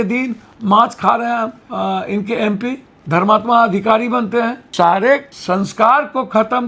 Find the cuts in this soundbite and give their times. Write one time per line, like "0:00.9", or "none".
0:01.6
0:02.9
0:04.6
0:05.3